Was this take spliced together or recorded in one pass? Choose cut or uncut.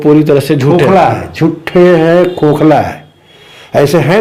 uncut